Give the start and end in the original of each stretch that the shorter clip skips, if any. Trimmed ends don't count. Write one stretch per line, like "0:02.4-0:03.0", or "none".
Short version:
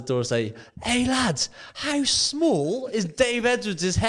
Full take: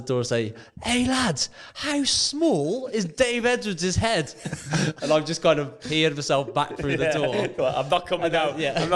none